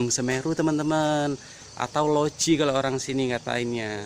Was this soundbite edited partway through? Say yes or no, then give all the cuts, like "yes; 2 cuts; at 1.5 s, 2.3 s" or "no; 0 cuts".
no; 0 cuts